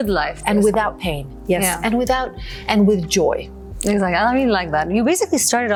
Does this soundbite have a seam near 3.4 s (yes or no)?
no